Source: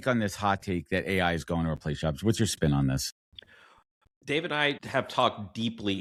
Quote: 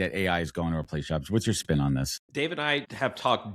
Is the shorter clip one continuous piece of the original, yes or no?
no